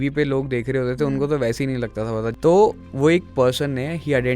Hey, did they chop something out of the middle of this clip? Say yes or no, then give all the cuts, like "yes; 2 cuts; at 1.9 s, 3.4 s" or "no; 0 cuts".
yes; 1 cut; at 2.3 s